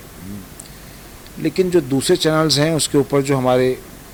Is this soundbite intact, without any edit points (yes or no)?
yes